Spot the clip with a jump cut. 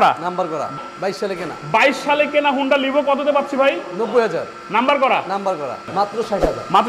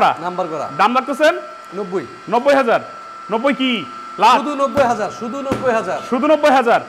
first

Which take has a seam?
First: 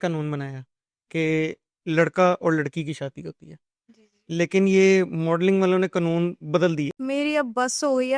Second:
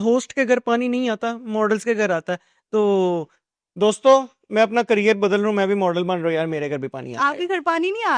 first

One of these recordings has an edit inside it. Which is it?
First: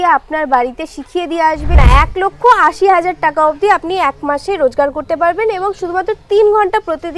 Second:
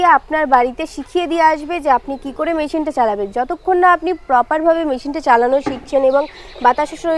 first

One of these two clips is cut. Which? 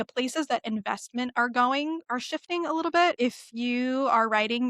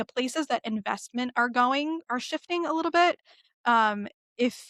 first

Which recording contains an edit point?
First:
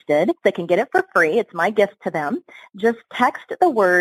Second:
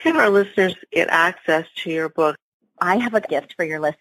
second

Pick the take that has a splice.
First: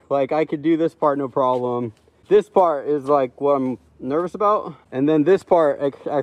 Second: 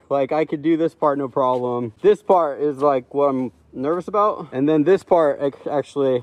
second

